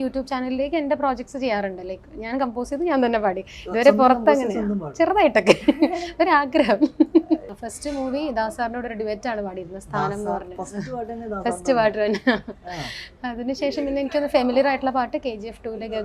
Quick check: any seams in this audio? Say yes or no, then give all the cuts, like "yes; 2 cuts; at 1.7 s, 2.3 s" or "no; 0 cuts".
yes; 1 cut; at 7.4 s